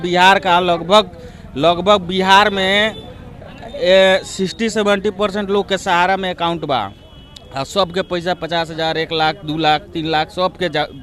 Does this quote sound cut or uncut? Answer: uncut